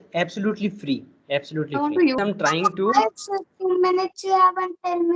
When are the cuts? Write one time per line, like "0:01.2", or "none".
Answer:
0:02.2